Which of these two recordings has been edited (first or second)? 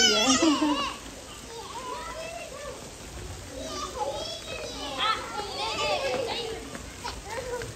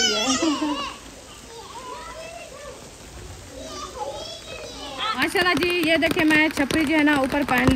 second